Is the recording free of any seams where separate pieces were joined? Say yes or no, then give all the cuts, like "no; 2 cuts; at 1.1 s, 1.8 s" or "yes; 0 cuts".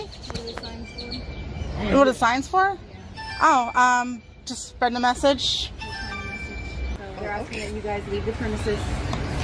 no; 1 cut; at 7.0 s